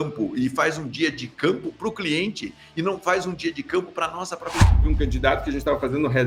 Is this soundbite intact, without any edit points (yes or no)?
no